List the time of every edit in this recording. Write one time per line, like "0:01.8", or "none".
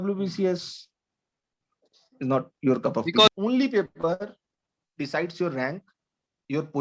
0:03.3